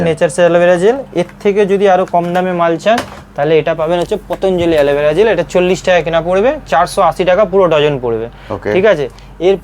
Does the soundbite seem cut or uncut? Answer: uncut